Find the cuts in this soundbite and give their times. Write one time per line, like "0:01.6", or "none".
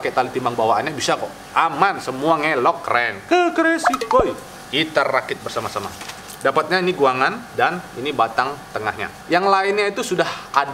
none